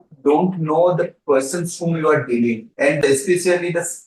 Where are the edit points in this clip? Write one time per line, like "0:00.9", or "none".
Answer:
0:03.0